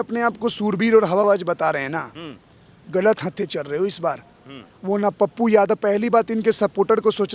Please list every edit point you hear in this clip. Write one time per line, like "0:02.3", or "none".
none